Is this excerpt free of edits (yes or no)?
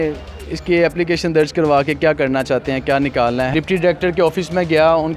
no